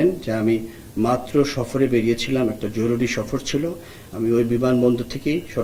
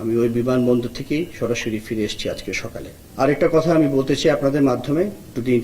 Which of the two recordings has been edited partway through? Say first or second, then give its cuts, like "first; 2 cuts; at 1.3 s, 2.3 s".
second; 1 cut; at 3.0 s